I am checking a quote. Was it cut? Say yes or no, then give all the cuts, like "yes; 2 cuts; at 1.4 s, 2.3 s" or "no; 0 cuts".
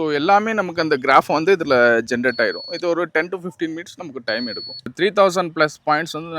yes; 1 cut; at 4.9 s